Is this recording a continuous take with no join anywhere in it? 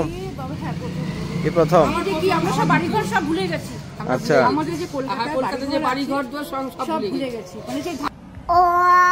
no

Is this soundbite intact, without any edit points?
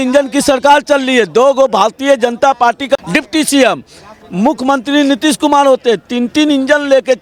yes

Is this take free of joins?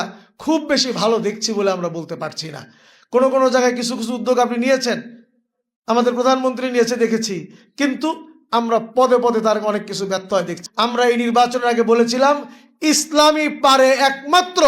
no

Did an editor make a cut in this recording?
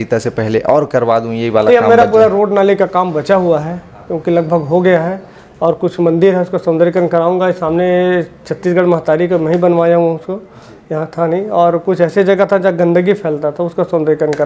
no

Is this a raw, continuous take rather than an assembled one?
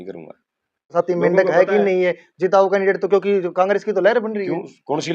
no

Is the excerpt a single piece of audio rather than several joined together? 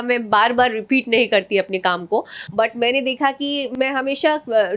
yes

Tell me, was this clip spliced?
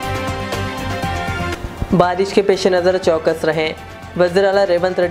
no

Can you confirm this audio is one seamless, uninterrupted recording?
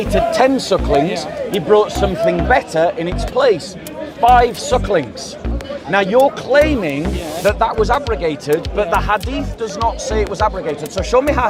yes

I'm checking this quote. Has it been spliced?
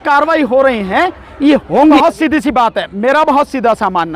yes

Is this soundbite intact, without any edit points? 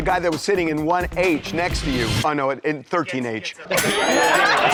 yes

